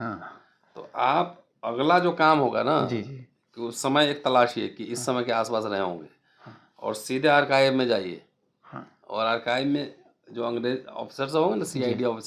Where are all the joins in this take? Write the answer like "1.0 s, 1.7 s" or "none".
none